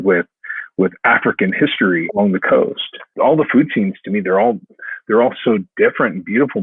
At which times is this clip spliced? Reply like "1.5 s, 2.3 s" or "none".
2.1 s, 3.1 s